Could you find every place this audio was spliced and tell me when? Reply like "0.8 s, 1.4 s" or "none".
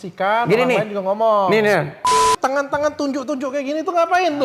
2.1 s